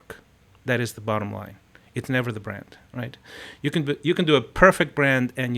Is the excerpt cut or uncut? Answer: uncut